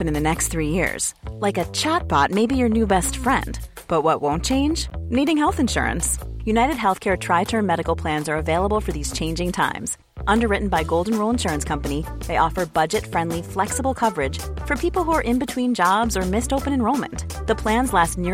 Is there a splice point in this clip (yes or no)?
no